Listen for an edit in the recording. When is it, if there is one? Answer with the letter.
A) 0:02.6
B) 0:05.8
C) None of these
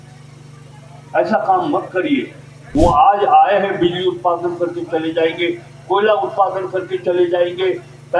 A